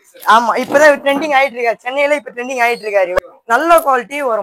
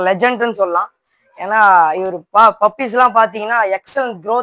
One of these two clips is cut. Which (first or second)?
first